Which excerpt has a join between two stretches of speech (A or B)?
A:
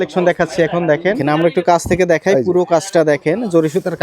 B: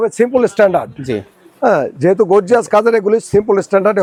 A